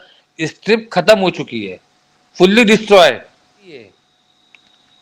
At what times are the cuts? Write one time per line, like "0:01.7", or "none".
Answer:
0:03.8